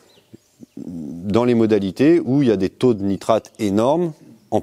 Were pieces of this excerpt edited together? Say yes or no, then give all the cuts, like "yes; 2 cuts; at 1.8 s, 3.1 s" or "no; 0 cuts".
no; 0 cuts